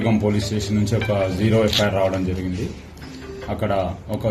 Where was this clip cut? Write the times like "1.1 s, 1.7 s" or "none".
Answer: none